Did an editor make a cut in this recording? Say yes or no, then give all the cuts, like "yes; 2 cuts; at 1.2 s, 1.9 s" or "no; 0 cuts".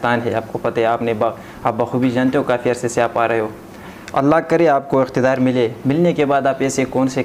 no; 0 cuts